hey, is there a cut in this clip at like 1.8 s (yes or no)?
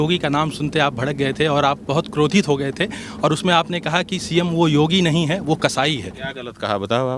no